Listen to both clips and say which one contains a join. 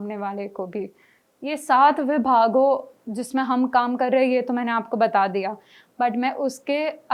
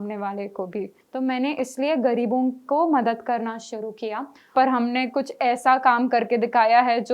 second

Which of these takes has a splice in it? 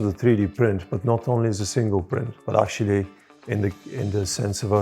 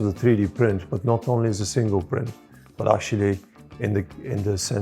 first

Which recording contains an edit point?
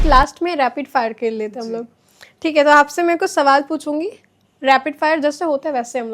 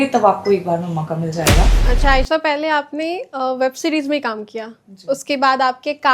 second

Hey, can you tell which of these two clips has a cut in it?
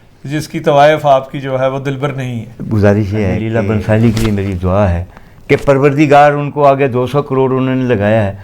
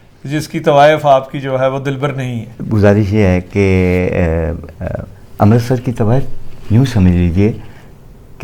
first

